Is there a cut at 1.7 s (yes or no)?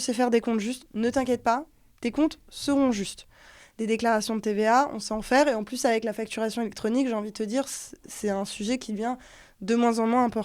no